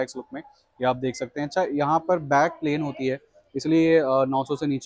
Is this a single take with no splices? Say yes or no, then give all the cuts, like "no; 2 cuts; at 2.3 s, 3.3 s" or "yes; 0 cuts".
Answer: yes; 0 cuts